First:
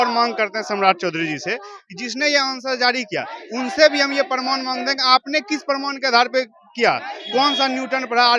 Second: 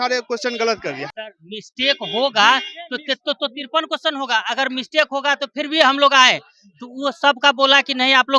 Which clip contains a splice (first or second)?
second